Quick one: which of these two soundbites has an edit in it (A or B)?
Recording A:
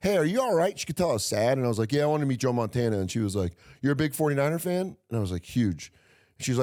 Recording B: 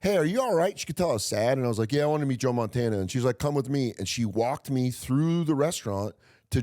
B